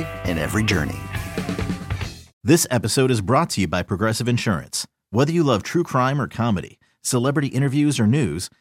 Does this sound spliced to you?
yes; 1 cut; at 2.3 s

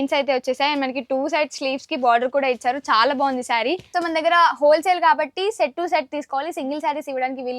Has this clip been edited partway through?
yes; 1 cut; at 3.8 s

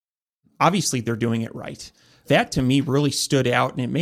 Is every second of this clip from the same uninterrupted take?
no; 1 cut; at 2.2 s

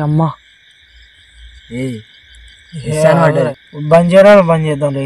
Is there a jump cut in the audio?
yes; 1 cut; at 3.5 s

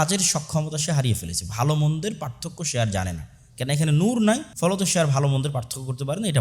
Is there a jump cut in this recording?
yes; 1 cut; at 4.5 s

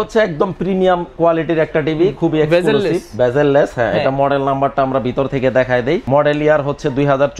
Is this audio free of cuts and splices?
no; 1 cut; at 6.0 s

